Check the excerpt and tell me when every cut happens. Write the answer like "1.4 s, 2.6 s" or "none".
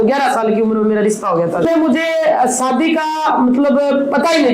1.7 s